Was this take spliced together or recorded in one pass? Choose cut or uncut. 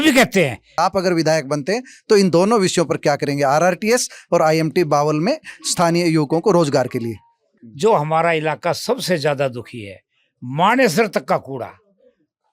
cut